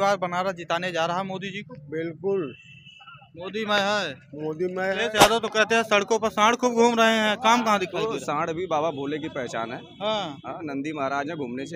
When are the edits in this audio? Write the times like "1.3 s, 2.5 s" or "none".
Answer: 5.0 s

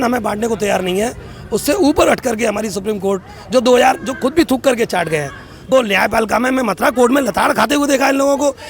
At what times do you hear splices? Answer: 5.7 s

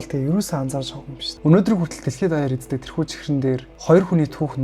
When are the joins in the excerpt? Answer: 1.2 s

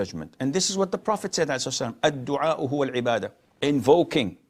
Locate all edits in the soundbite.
3.4 s

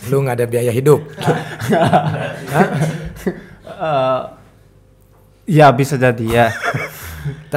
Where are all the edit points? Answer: none

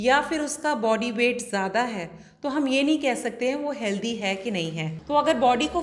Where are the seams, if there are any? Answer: 4.9 s

